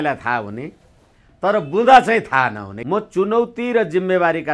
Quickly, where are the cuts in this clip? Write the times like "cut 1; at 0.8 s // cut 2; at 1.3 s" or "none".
cut 1; at 2.7 s